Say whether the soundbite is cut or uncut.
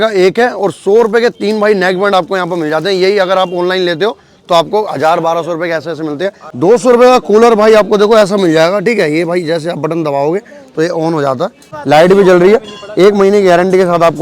cut